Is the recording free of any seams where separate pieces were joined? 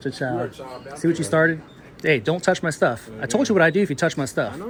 yes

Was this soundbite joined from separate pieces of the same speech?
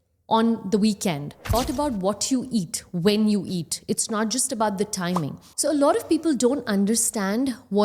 yes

